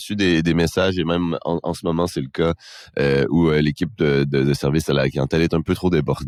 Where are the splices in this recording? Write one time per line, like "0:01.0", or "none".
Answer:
none